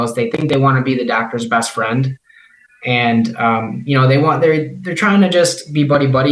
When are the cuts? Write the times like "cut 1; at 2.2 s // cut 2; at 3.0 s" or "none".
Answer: none